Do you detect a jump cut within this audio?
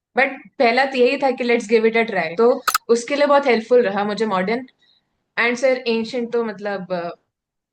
yes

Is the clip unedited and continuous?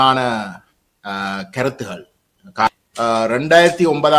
no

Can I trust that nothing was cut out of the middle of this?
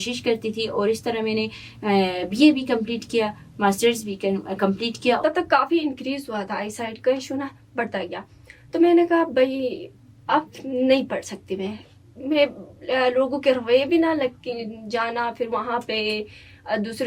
no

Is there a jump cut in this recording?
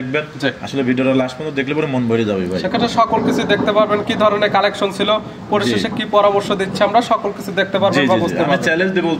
no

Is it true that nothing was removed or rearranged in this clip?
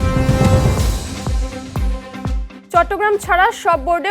no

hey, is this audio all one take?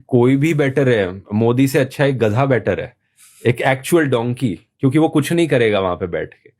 no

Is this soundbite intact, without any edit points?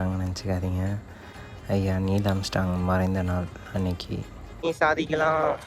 no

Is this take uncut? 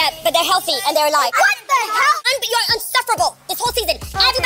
no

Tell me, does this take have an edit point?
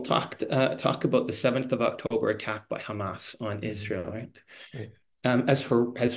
no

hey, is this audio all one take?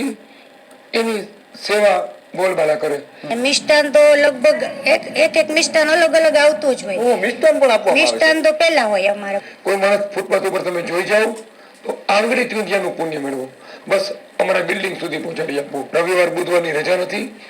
no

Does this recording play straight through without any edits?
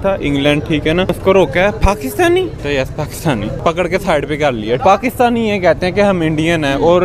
no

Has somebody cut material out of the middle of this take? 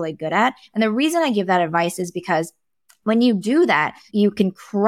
no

